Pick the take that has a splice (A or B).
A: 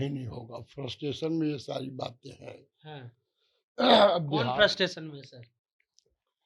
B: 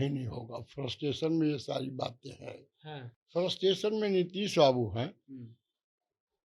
B